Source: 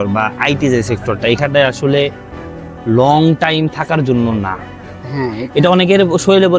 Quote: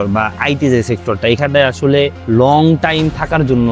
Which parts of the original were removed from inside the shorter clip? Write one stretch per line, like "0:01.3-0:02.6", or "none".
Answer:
0:02.2-0:02.8